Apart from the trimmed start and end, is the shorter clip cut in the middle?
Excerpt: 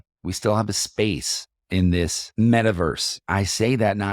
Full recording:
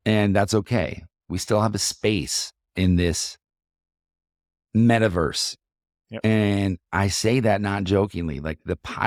yes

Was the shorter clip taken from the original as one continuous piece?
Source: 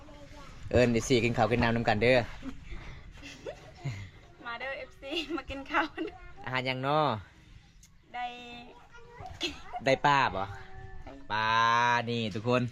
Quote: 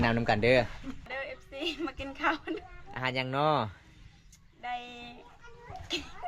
no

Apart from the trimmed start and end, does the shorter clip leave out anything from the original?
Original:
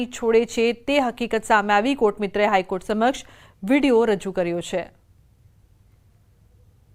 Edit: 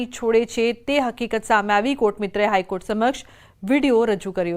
no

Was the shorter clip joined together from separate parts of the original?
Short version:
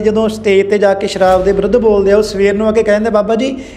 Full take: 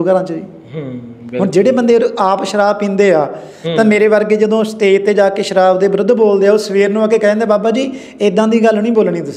no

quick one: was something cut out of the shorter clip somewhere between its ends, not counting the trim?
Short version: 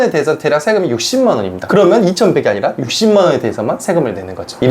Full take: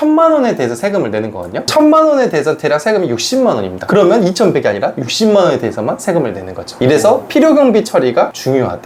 no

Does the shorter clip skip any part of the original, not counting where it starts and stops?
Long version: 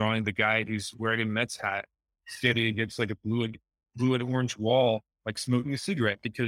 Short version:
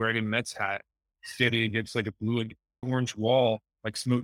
yes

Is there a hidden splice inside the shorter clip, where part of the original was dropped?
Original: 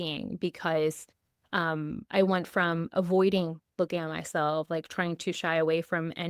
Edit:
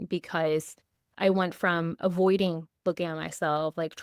yes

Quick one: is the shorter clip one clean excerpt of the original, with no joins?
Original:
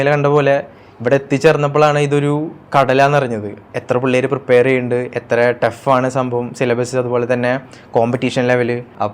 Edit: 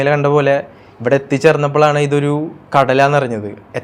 yes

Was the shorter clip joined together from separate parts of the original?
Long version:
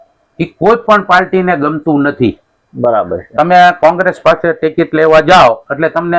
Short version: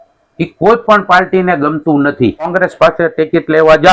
yes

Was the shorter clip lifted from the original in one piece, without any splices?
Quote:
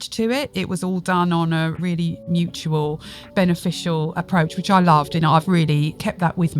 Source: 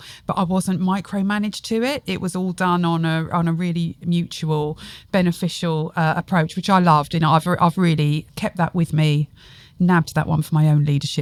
no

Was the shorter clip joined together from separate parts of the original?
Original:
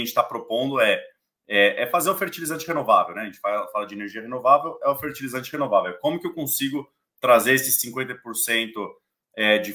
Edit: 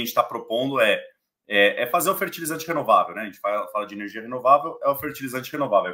no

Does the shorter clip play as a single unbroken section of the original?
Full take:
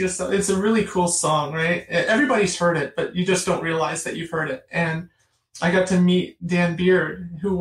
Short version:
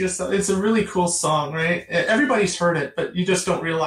yes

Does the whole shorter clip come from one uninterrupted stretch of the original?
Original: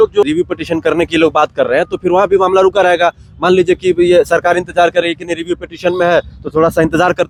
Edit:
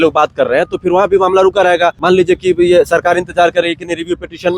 no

